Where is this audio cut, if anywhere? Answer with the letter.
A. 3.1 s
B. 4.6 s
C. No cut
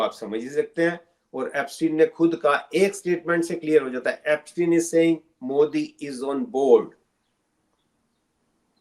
C